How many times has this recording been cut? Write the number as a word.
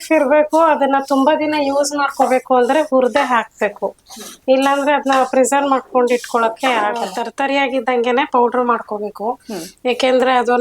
one